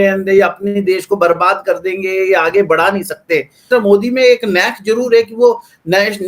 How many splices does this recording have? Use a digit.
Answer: 1